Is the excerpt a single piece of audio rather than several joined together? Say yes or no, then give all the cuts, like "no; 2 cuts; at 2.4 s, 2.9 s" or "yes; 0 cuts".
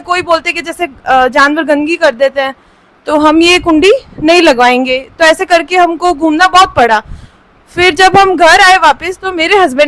yes; 0 cuts